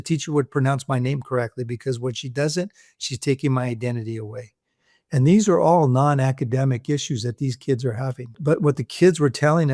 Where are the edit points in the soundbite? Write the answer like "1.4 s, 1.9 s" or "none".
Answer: 8.3 s